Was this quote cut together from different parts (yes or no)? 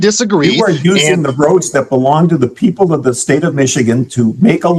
no